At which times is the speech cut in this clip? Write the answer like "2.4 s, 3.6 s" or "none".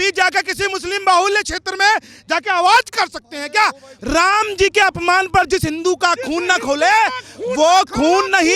3.9 s